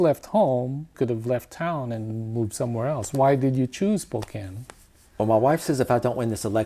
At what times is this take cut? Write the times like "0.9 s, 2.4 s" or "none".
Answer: 1.0 s